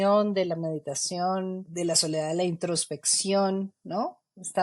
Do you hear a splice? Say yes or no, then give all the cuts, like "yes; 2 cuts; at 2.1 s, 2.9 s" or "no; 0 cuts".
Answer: yes; 1 cut; at 1.6 s